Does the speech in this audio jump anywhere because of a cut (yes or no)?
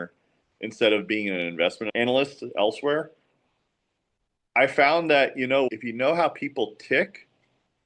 yes